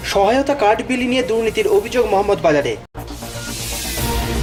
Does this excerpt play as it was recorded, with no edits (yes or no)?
yes